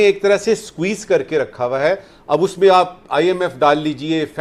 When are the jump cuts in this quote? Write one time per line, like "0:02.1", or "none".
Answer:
none